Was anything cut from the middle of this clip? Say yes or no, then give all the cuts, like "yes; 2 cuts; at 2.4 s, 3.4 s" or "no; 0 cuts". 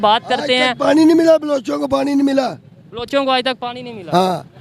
no; 0 cuts